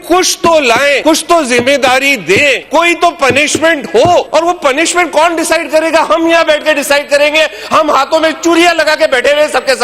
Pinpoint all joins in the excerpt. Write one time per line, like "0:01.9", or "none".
0:01.0
0:02.6
0:04.3